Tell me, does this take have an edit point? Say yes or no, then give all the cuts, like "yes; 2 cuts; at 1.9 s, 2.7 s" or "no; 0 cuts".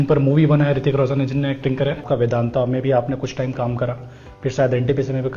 yes; 1 cut; at 2.0 s